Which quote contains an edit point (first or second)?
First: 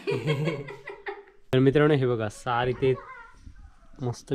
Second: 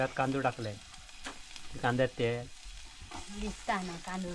first